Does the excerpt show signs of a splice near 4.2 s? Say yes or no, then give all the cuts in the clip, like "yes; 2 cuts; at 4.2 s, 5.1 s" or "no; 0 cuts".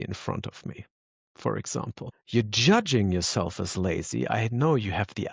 no; 1 cut; at 2.1 s